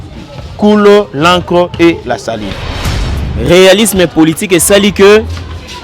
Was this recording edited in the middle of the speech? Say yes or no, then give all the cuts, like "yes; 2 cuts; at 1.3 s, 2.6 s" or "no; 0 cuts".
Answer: yes; 1 cut; at 2.9 s